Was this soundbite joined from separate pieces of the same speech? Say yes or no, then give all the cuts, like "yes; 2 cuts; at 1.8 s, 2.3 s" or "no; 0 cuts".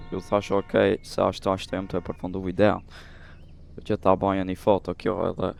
no; 0 cuts